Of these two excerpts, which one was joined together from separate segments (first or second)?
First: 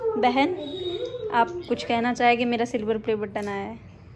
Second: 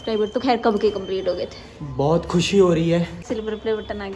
second